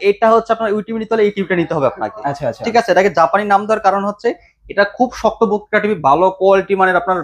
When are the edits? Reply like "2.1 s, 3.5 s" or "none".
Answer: none

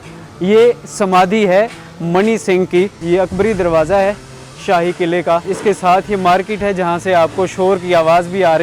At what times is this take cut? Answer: 3.0 s, 5.5 s

